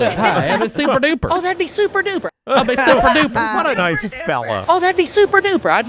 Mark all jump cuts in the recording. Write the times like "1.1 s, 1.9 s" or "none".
4.6 s